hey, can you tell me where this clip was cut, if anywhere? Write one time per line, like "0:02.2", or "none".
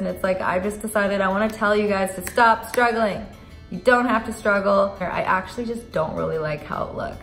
0:05.0